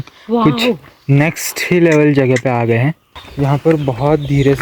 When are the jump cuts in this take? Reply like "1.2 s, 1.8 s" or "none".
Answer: 3.1 s